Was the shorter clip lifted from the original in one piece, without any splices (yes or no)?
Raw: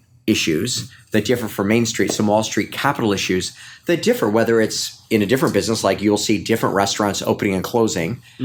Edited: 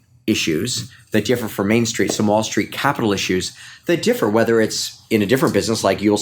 yes